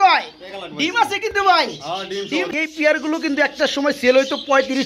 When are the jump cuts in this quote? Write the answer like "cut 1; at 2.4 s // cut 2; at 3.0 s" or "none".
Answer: cut 1; at 2.5 s